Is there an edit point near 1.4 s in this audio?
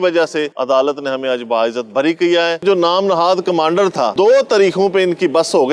no; 2 cuts; at 2.6 s, 4.1 s

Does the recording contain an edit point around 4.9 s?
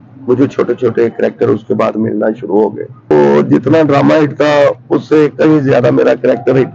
no; 1 cut; at 3.1 s

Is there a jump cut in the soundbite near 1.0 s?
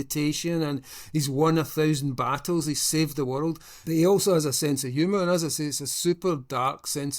no; 1 cut; at 3.7 s

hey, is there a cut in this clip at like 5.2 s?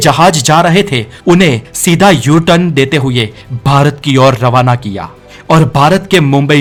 no; 0 cuts

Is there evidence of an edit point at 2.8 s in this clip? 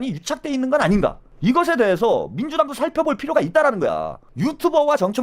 no; 2 cuts; at 1.3 s, 4.2 s

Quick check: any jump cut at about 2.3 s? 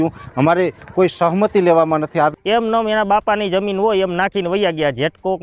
yes; 1 cut; at 2.3 s

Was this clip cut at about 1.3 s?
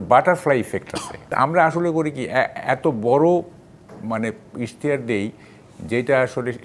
yes; 1 cut; at 1.3 s

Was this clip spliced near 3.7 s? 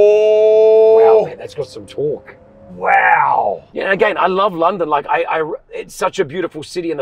yes; 1 cut; at 3.7 s

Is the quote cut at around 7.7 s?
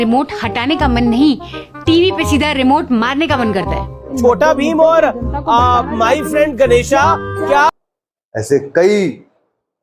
yes; 1 cut; at 7.7 s

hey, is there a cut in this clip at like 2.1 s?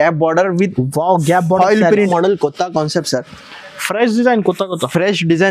yes; 1 cut; at 2.1 s

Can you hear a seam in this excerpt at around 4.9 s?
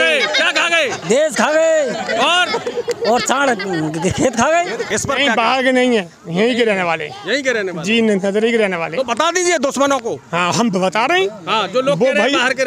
yes; 1 cut; at 4.9 s

